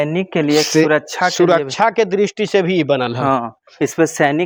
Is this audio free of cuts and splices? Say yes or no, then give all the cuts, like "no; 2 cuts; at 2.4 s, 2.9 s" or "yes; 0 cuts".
yes; 0 cuts